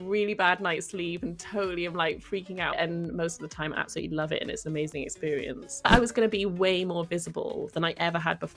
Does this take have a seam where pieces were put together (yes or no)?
yes